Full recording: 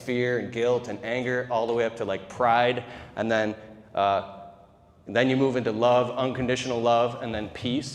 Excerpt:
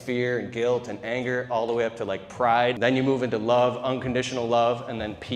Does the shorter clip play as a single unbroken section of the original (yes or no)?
no